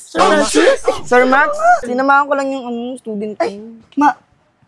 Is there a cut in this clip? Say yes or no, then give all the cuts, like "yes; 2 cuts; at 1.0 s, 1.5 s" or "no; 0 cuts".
yes; 1 cut; at 1.8 s